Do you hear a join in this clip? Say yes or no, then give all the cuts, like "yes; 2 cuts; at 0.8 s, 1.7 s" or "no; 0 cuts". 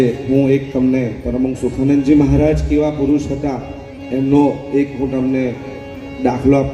no; 0 cuts